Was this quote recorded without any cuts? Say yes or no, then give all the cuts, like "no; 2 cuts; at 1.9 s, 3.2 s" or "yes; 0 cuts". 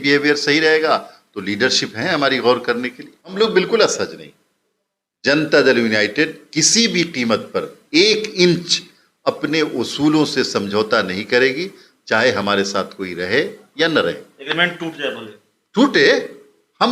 no; 1 cut; at 3.3 s